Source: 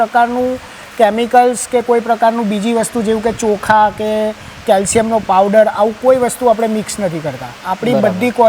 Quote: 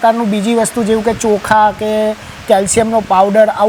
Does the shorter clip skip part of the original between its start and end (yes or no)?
no